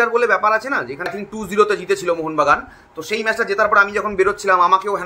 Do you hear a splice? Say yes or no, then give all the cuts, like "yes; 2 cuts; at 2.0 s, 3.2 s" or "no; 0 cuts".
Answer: yes; 1 cut; at 1.1 s